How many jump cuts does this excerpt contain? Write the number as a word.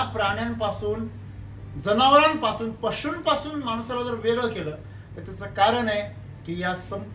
zero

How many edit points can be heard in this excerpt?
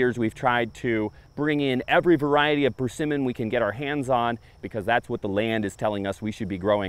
two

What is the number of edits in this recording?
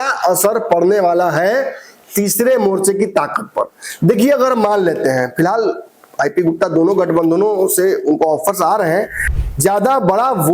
one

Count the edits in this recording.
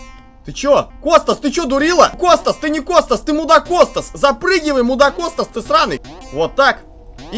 three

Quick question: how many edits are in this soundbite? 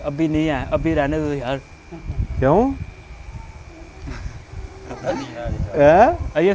zero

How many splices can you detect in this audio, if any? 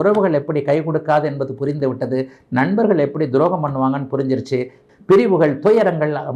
one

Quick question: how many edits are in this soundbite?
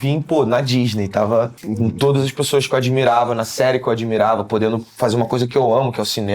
one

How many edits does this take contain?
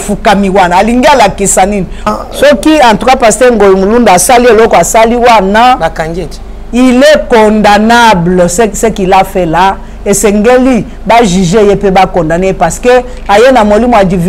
one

